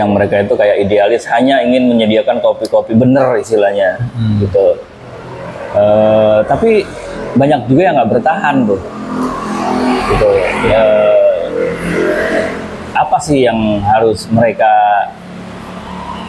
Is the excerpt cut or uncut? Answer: uncut